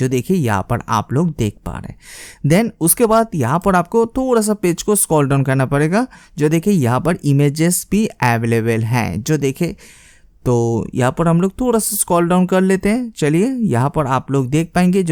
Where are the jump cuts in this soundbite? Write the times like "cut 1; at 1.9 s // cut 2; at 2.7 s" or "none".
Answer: none